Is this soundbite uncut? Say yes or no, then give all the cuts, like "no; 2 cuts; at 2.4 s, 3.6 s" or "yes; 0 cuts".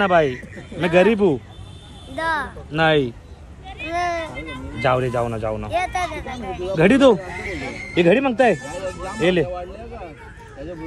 yes; 0 cuts